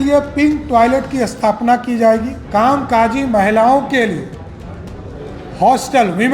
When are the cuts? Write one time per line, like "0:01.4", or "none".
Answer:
0:02.4